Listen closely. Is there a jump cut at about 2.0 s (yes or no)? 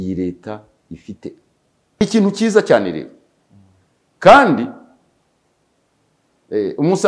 yes